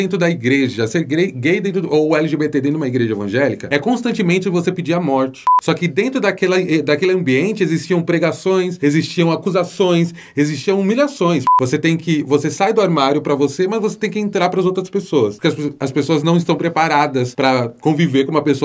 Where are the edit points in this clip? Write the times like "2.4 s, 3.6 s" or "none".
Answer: 5.5 s, 11.6 s